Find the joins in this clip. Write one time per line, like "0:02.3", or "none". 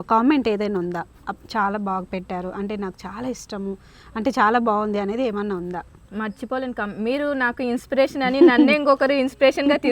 0:06.0